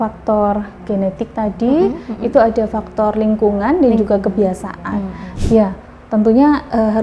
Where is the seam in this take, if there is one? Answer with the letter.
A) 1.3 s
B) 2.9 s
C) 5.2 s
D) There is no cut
C